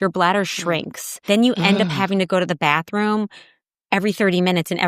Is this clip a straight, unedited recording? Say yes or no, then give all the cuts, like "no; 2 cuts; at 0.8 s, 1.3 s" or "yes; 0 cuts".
no; 1 cut; at 1.2 s